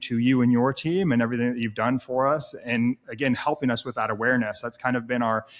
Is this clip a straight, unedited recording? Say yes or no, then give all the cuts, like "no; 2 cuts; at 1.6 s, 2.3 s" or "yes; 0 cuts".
yes; 0 cuts